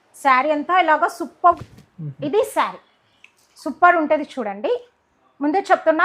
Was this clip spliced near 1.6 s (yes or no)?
yes